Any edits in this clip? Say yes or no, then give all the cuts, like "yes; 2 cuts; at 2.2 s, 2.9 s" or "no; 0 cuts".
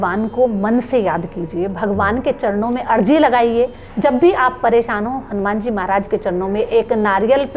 no; 0 cuts